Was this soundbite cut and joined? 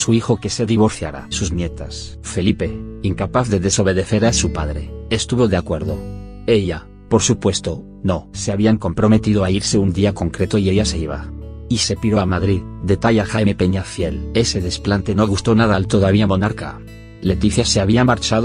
no; 0 cuts

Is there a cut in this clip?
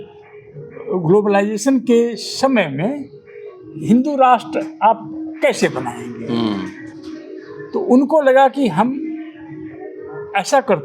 no; 0 cuts

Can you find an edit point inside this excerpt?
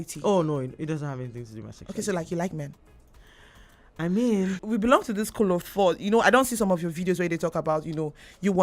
yes; 1 cut; at 4.5 s

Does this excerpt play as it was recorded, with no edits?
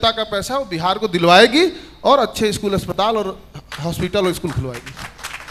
yes; 0 cuts

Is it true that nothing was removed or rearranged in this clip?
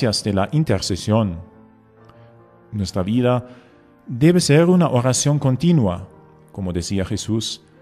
no; 1 cut; at 5.4 s

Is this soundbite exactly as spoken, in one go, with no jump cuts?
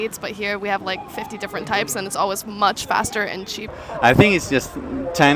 no; 1 cut; at 3.8 s

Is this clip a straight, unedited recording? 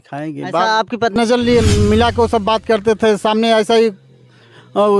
no; 1 cut; at 1.2 s

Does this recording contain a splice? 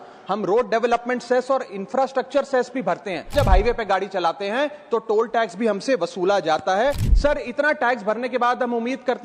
yes; 2 cuts; at 3.3 s, 7.1 s

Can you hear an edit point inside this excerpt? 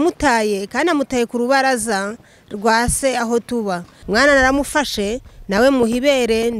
yes; 1 cut; at 3.9 s

